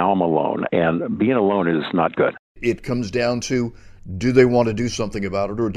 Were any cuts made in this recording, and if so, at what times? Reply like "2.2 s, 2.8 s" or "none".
2.5 s